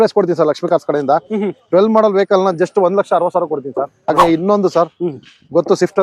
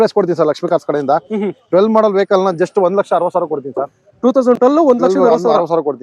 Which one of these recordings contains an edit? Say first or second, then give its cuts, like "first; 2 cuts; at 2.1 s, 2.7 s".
first; 1 cut; at 3.9 s